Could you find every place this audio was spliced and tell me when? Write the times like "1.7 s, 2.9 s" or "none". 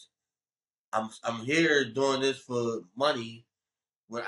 none